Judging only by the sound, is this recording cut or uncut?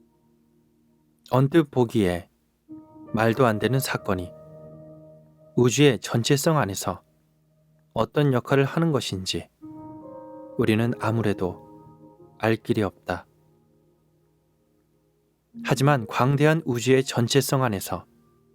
cut